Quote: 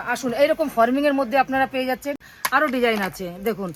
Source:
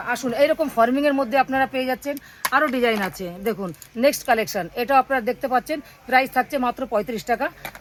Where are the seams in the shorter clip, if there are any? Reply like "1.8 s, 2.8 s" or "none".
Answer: none